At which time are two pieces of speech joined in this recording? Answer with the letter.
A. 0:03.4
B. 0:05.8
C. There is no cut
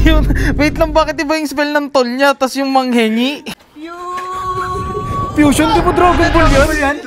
A